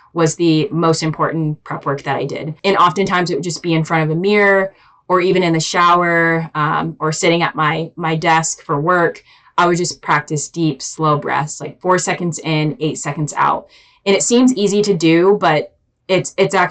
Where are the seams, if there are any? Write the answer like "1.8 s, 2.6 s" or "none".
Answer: 2.5 s